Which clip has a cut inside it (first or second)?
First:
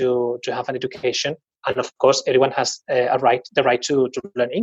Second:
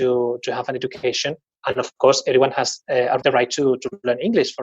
second